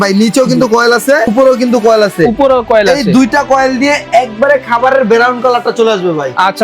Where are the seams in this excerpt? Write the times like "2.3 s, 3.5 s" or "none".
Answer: 1.3 s